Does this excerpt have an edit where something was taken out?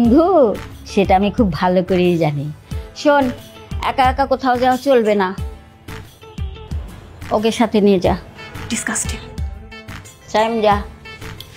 no; 0 cuts

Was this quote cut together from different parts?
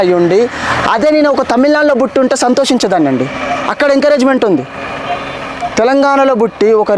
no; 0 cuts

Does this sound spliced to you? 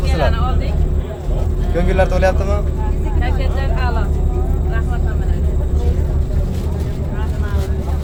no; 0 cuts

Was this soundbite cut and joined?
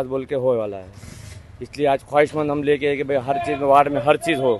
no; 0 cuts

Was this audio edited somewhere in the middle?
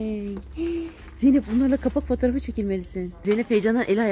no; 0 cuts

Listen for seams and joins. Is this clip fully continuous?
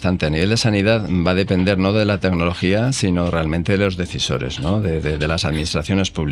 yes; 0 cuts

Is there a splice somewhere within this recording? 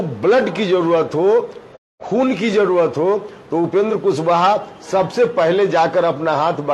no; 0 cuts

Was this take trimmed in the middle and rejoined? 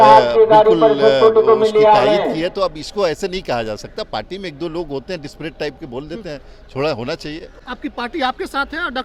no; 0 cuts

